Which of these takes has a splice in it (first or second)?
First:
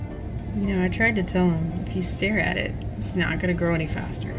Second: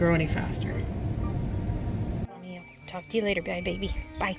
second